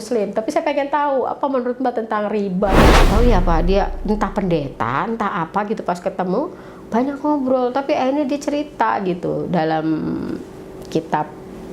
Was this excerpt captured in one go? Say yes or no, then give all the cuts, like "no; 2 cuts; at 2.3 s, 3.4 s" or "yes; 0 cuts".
no; 1 cut; at 3.0 s